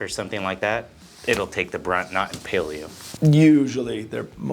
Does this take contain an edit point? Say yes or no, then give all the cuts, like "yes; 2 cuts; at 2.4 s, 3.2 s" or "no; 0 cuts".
yes; 1 cut; at 3.1 s